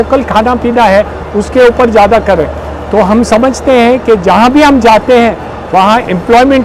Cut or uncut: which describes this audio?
uncut